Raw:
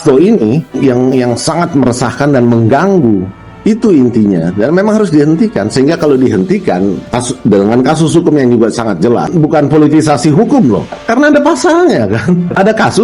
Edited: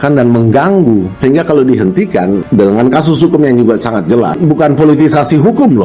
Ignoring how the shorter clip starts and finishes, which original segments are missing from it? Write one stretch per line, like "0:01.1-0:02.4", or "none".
0:03.3-0:05.7
0:07.0-0:07.4